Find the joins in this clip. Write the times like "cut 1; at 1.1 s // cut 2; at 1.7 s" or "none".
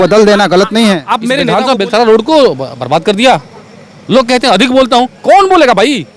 cut 1; at 1.4 s